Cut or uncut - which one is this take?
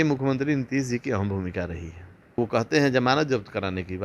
cut